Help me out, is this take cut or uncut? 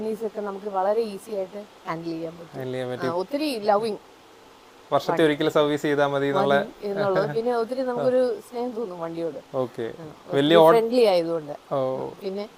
uncut